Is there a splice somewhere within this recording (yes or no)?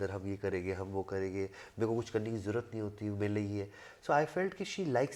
no